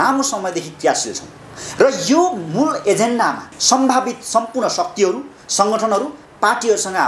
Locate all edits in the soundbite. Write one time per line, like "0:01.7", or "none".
0:03.6